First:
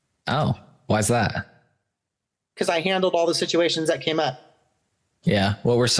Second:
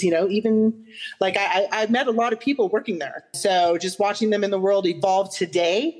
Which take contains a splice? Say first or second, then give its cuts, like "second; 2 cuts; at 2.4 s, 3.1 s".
second; 1 cut; at 3.3 s